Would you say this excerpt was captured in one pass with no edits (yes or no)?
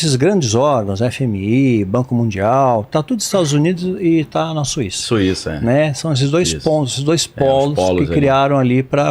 yes